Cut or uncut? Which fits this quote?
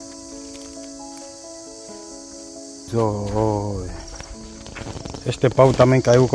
cut